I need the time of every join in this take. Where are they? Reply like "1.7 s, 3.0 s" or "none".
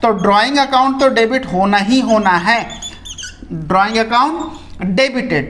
none